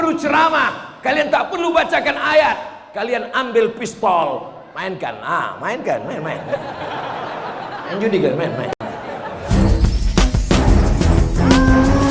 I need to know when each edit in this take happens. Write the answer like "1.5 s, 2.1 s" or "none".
9.4 s

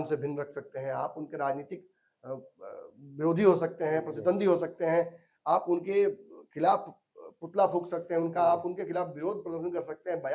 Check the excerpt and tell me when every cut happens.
none

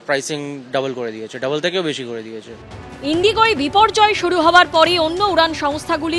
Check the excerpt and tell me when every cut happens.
none

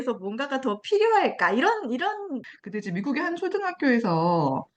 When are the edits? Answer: 2.5 s

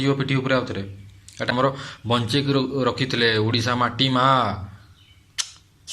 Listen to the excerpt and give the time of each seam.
1.5 s

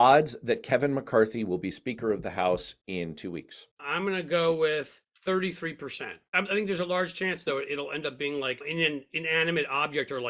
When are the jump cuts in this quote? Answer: none

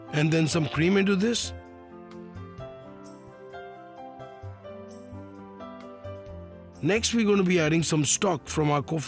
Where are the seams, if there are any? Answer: 1.6 s, 6.8 s

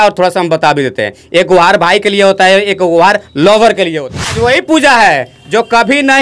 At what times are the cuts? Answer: 4.6 s

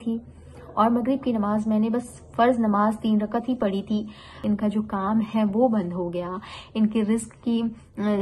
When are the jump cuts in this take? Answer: 4.3 s

